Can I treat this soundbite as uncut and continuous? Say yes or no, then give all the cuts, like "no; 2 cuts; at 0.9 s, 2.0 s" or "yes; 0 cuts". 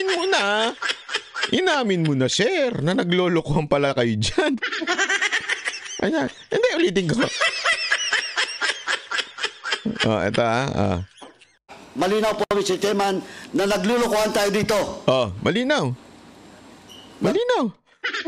yes; 0 cuts